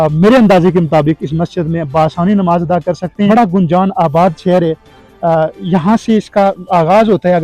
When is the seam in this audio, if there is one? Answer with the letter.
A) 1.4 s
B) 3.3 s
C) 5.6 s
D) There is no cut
B